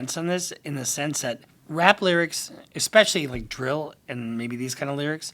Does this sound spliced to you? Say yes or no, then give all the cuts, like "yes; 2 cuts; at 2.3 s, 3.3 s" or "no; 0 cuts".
yes; 1 cut; at 1.5 s